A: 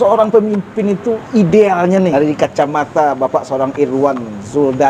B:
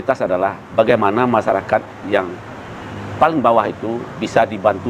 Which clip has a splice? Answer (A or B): A